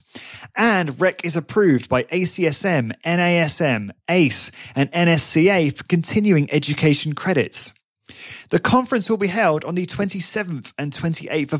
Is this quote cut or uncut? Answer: uncut